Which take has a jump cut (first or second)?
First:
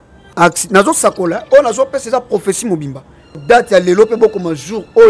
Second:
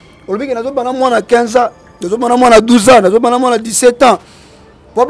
first